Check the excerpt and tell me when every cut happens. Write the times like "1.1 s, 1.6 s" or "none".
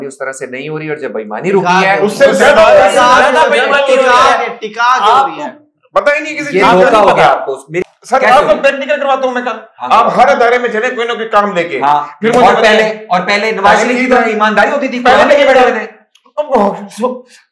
none